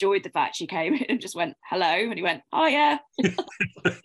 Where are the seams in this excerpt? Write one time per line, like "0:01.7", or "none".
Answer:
none

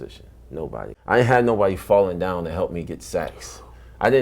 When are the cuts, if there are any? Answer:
0:00.9

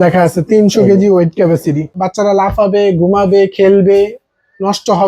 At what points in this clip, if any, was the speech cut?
0:02.0

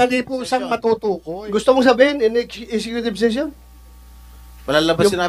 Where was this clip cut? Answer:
0:01.2

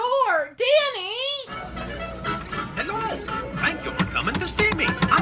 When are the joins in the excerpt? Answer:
0:02.0

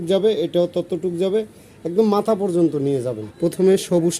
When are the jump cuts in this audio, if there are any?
0:03.2

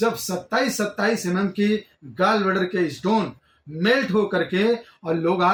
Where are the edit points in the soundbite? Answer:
none

